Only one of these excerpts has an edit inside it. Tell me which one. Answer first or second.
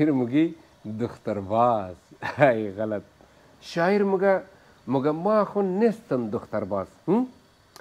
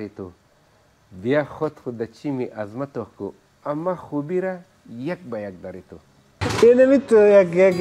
second